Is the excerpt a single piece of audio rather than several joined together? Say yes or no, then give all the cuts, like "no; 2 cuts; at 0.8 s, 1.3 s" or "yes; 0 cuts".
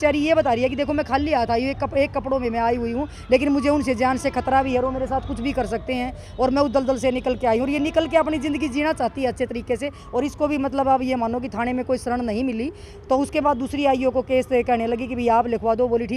yes; 0 cuts